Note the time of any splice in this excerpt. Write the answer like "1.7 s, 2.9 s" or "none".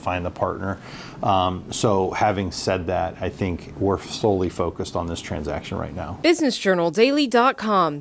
6.1 s